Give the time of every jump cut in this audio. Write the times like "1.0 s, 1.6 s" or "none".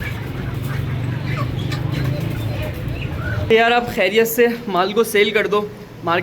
3.4 s